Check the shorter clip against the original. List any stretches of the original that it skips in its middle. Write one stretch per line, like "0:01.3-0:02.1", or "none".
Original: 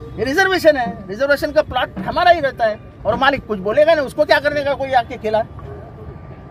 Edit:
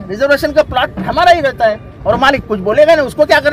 none